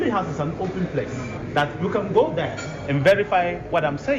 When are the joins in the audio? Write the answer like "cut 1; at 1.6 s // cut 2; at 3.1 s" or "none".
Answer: none